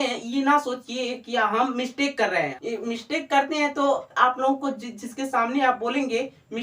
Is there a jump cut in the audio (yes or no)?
yes